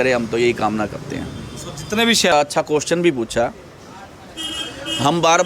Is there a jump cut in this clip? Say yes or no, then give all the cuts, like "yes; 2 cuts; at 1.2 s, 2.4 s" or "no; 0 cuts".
yes; 1 cut; at 2.3 s